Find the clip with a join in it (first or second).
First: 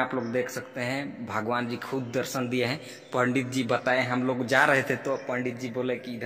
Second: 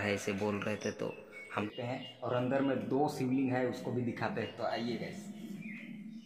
second